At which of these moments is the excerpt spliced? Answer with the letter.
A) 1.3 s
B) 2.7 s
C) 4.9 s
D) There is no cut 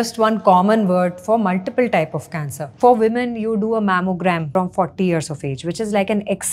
B